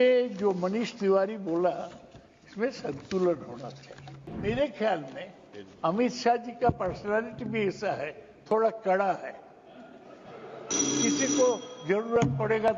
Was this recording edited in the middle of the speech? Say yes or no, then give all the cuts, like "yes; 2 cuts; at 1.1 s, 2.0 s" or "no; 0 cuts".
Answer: yes; 1 cut; at 4.3 s